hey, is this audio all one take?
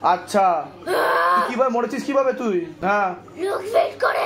no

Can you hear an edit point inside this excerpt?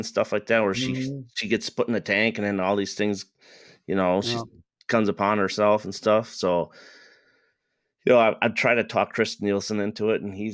no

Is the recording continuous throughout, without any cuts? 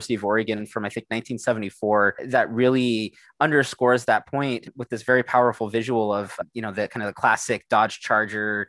yes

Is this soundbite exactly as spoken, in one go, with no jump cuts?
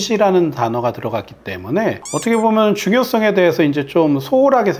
yes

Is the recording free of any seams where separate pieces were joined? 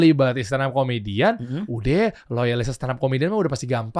yes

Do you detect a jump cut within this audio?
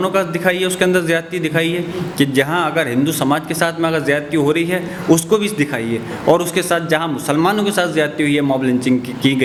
no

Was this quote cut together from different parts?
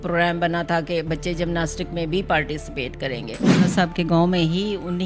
yes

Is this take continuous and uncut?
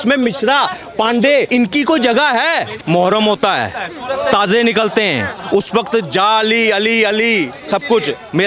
no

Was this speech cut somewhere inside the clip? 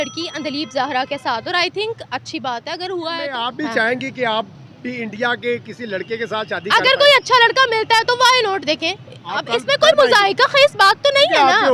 yes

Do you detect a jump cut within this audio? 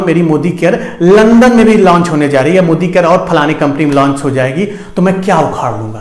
no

